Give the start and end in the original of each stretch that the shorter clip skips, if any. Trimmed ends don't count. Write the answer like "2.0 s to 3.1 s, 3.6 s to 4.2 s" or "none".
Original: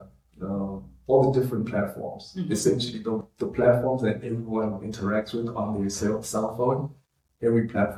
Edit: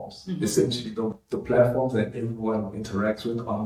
none